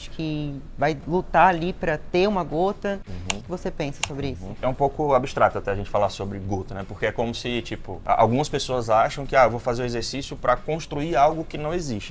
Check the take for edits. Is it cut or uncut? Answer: uncut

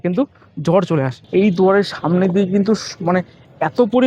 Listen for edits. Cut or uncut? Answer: cut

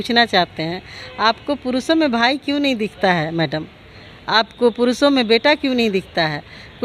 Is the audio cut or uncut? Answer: uncut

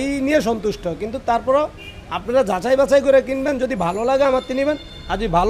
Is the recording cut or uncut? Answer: uncut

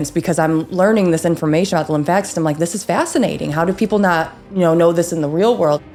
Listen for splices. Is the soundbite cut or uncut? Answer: uncut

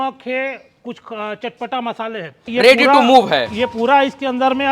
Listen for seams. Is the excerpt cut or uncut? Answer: cut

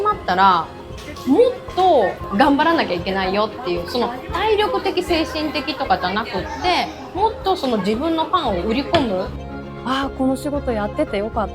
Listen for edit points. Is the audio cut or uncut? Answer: cut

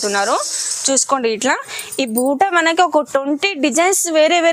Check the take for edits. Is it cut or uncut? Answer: uncut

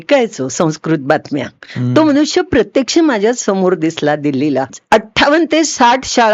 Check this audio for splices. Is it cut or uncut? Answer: cut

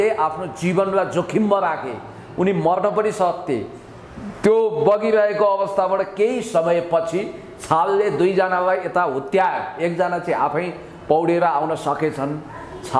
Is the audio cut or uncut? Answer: uncut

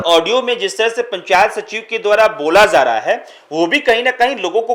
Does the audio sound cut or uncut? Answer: uncut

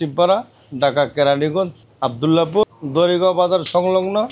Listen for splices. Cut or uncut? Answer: cut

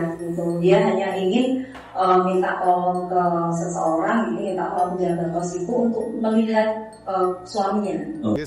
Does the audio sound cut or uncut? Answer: uncut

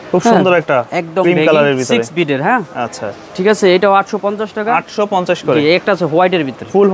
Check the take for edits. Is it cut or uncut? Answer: uncut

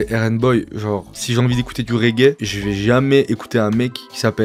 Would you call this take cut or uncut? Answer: uncut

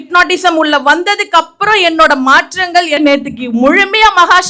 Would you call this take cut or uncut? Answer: cut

